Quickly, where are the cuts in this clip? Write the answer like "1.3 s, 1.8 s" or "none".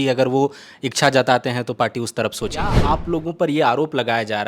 2.7 s